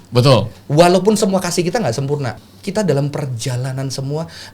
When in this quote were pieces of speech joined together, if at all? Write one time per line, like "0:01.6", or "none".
0:02.4